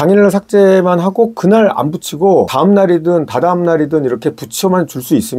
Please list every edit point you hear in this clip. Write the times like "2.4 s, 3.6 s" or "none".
none